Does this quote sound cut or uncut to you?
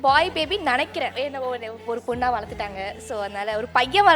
cut